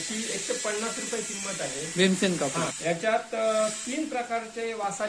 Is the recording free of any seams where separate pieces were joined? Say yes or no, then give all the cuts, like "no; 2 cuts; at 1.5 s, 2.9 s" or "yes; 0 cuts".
no; 1 cut; at 2.8 s